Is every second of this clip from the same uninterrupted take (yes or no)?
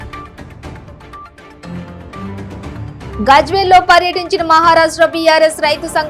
no